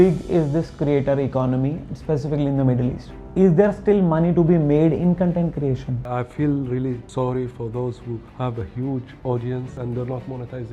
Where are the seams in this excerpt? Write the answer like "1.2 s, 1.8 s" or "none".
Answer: 3.1 s, 6.0 s, 7.0 s, 8.3 s, 9.7 s

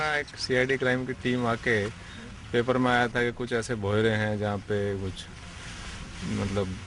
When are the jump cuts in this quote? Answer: none

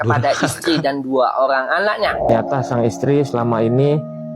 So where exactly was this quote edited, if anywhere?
2.2 s

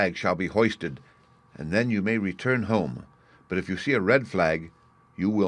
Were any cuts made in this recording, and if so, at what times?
3.4 s

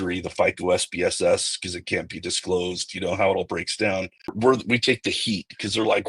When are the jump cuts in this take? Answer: 4.4 s

